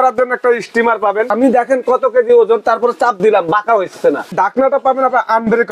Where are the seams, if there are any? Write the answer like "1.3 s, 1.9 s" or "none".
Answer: 1.3 s, 4.3 s